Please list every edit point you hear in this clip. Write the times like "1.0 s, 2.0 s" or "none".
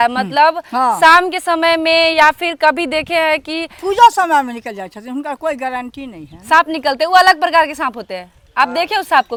none

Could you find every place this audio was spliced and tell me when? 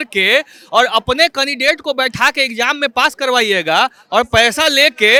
none

